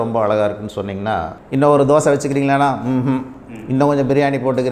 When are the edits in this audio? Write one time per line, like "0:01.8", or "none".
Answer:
0:01.3

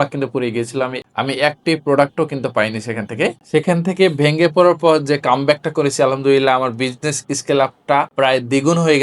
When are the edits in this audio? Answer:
0:03.4
0:08.1

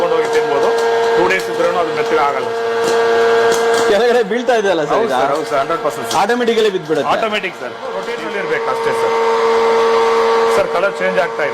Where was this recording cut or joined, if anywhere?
0:07.9

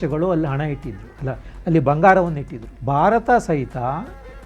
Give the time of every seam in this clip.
none

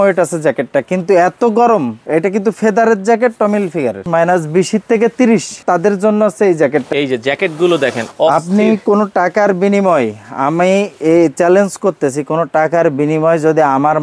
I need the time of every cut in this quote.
0:04.0
0:05.6
0:06.9

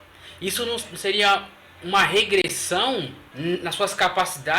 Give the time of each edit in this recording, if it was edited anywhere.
0:03.2

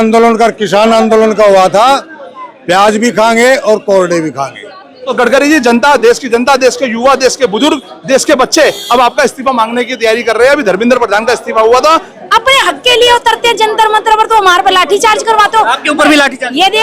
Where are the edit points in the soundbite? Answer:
0:05.0
0:12.1

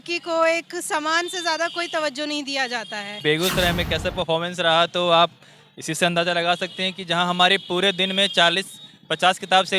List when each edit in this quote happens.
0:03.2

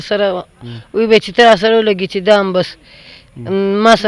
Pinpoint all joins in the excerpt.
none

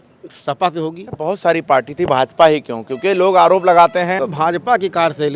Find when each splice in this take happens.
0:01.2
0:04.2

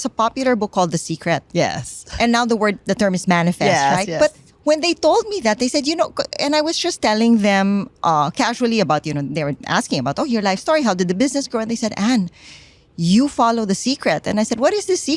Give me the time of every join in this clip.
none

